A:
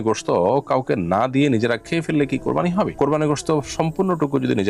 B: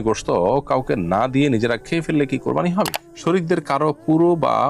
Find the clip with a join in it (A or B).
B